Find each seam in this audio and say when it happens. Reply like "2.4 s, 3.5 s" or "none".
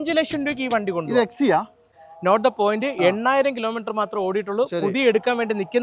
2.0 s

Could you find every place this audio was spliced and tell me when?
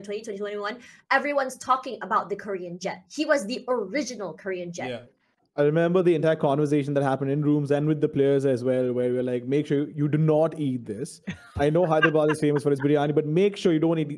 5.1 s

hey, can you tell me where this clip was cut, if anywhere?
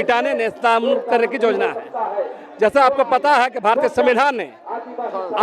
none

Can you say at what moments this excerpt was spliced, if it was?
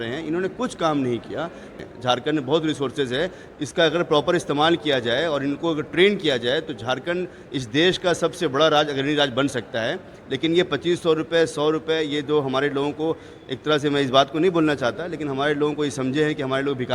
1.8 s

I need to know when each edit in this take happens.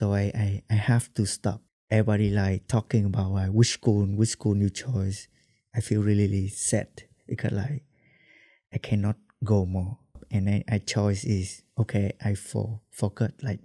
1.7 s, 10.2 s

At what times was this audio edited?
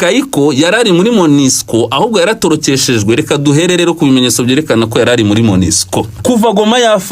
6.1 s

